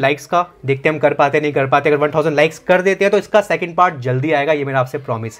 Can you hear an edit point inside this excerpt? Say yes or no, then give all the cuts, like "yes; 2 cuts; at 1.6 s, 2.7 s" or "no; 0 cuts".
no; 0 cuts